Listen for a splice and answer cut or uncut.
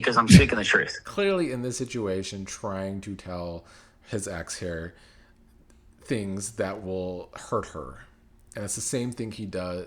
cut